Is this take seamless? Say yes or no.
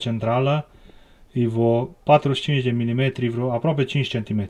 yes